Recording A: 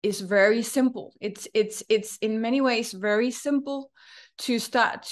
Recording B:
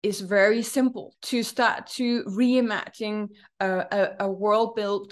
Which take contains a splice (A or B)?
B